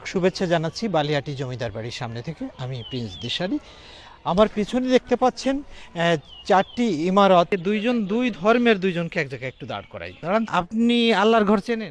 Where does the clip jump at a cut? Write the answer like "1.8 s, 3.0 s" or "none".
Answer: 7.5 s, 10.5 s